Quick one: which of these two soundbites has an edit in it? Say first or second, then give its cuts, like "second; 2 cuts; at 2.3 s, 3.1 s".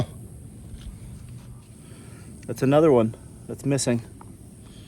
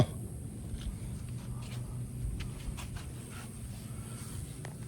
first; 1 cut; at 1.6 s